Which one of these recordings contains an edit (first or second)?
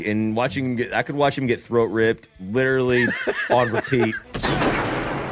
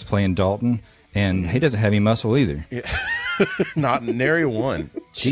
first